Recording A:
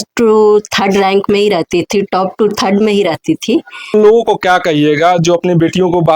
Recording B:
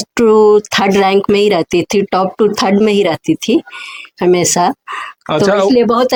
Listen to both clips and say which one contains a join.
A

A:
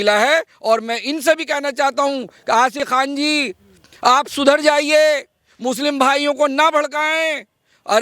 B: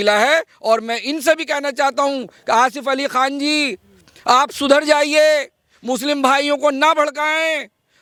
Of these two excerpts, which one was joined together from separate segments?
A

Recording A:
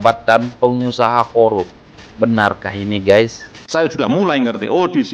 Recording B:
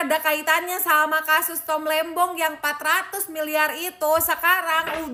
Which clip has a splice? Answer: A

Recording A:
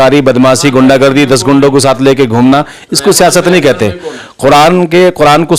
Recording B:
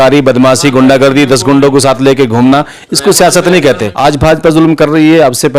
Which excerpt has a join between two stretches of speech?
B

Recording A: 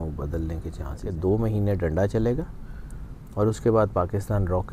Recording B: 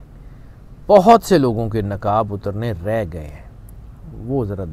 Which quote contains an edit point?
A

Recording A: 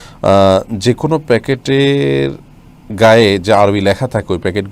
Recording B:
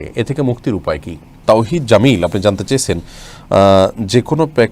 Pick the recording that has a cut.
B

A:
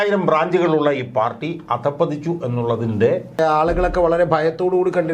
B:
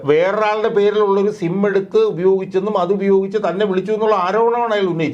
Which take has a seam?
A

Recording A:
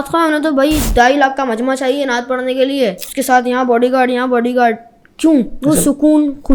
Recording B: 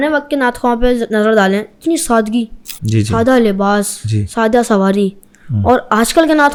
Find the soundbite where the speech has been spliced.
A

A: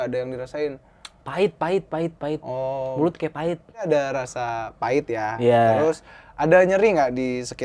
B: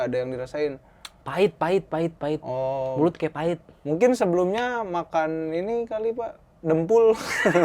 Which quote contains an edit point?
A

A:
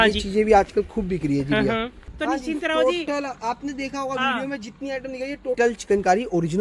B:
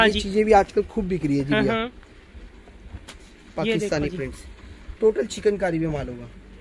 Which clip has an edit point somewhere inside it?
A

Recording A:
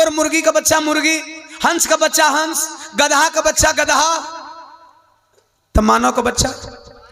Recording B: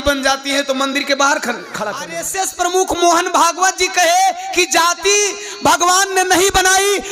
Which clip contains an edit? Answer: B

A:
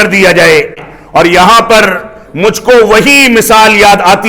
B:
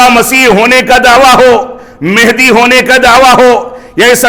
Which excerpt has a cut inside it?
A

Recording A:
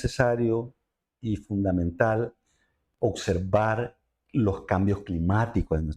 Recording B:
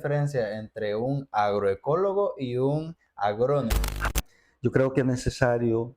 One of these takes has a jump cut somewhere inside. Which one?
B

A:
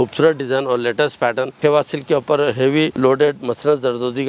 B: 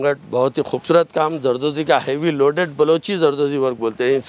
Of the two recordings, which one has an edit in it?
A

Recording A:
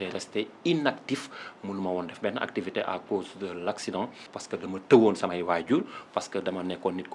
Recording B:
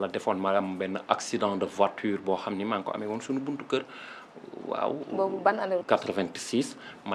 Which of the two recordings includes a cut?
A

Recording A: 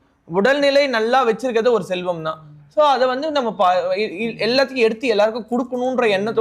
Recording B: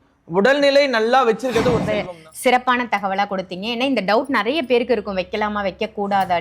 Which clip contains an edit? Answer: B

